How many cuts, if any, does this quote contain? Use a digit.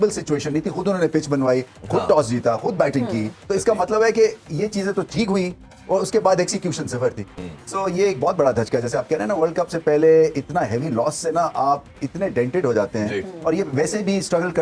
0